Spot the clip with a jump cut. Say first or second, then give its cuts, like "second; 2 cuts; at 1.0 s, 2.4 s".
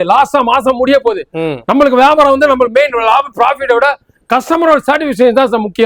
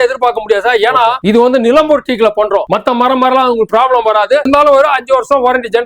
second; 3 cuts; at 1.2 s, 2.7 s, 4.4 s